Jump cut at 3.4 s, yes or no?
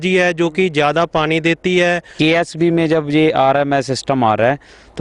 no